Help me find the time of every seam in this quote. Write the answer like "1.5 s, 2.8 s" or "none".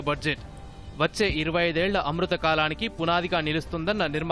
none